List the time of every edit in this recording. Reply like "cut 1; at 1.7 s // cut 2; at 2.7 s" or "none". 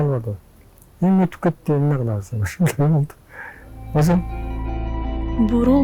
none

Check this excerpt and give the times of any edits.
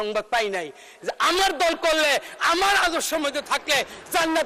none

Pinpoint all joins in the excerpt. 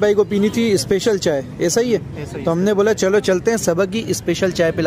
none

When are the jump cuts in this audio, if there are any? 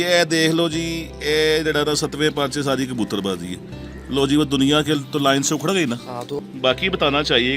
cut 1; at 6.4 s

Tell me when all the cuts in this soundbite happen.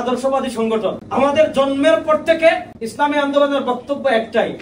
cut 1; at 1.0 s // cut 2; at 2.8 s

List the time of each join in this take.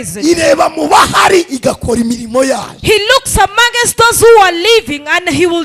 none

